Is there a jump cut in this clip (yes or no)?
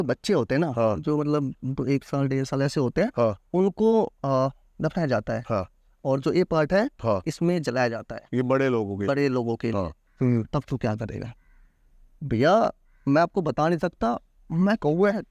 yes